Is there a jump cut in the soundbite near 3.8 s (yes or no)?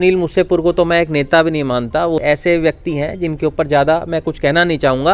no